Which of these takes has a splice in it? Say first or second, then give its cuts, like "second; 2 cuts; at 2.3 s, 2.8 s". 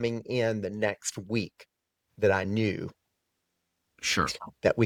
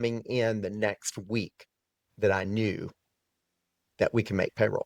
second; 1 cut; at 3.8 s